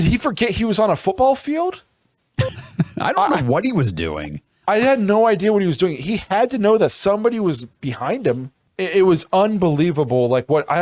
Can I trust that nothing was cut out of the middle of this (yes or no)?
yes